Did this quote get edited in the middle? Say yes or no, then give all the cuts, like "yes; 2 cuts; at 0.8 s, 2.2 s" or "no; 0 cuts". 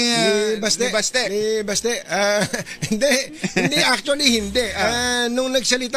no; 0 cuts